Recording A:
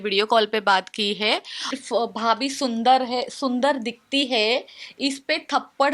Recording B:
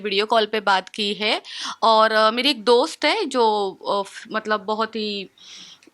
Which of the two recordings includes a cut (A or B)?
A